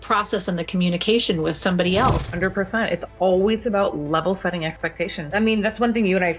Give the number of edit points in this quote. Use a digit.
1